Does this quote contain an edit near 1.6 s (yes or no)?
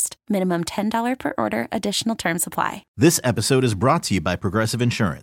no